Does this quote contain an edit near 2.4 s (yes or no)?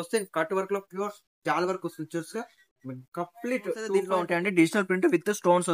no